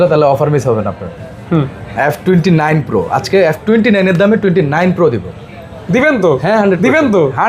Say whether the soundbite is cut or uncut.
uncut